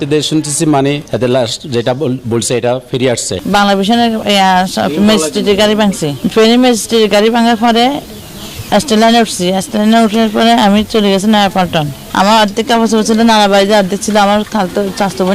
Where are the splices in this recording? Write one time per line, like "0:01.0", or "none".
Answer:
0:01.1
0:03.3
0:12.0

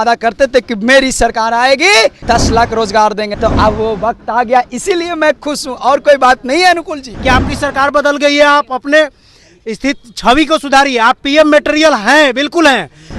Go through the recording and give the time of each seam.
0:02.2
0:03.3
0:07.0

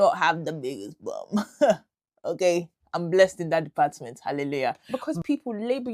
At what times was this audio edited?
0:04.9

